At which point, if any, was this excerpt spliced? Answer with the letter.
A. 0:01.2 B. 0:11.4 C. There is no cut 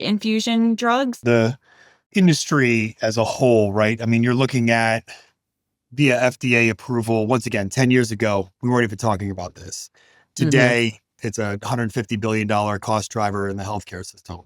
A